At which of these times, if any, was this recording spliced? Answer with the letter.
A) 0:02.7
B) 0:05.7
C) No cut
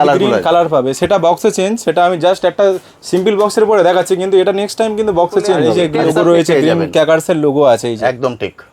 B